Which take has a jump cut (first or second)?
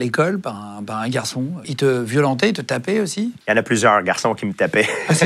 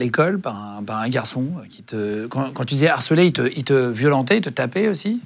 first